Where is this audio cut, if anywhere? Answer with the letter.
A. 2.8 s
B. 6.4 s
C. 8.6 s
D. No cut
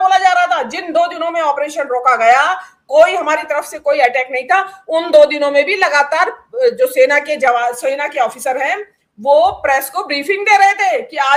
D